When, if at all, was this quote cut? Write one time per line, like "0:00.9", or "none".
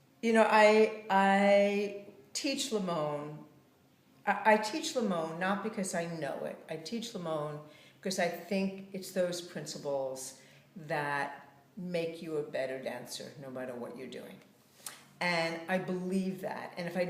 0:02.3

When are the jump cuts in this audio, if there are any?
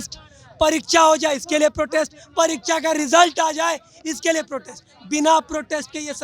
none

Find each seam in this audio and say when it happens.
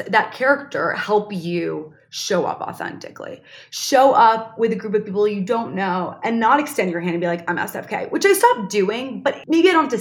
none

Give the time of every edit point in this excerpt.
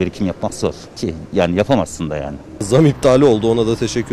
0:00.9
0:02.7

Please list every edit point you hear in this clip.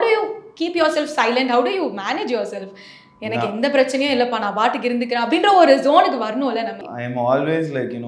none

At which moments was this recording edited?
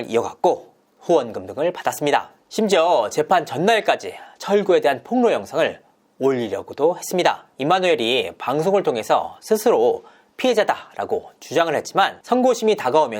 0:02.4
0:07.5
0:12.2

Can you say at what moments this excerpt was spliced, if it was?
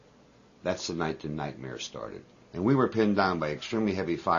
0:02.4

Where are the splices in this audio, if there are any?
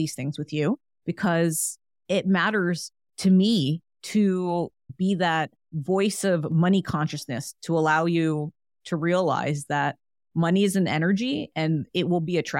0:00.9
0:03.9
0:04.8
0:05.7

